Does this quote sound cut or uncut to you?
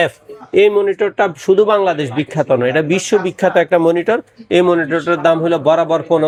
uncut